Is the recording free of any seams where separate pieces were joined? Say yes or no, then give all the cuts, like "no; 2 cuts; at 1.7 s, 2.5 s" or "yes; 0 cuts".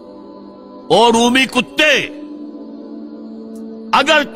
yes; 0 cuts